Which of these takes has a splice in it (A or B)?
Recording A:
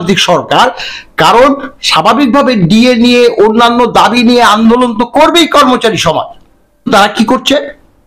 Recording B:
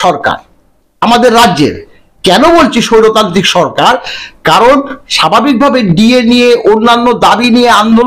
A